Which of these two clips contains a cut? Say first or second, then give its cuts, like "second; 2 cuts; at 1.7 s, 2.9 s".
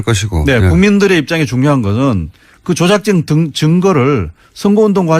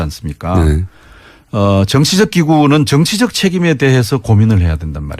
first; 1 cut; at 3.8 s